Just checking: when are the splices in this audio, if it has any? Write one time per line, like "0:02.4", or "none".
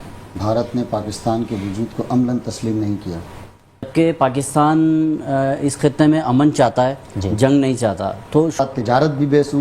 0:03.9
0:08.6